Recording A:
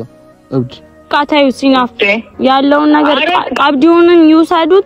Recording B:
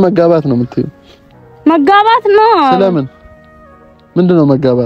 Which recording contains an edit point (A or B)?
A